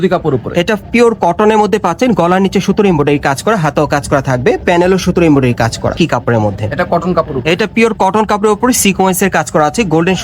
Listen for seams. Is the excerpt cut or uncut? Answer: cut